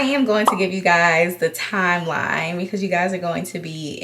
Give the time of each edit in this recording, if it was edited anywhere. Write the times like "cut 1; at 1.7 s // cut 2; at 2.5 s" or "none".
none